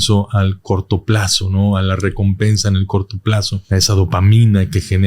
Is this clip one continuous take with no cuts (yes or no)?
no